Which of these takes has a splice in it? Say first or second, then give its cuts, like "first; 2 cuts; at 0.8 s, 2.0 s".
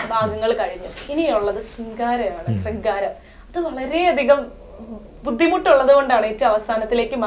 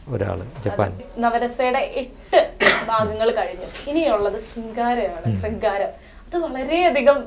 second; 1 cut; at 1.1 s